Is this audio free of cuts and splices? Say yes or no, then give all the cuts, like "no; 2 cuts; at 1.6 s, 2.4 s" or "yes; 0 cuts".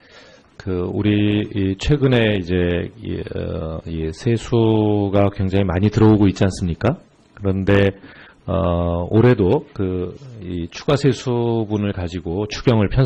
yes; 0 cuts